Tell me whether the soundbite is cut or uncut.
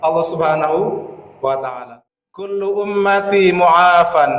cut